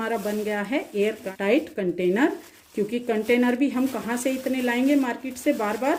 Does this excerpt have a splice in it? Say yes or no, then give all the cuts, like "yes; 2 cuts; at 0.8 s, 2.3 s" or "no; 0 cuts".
no; 0 cuts